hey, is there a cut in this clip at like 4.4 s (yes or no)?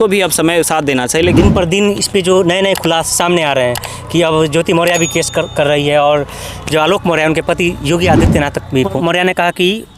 no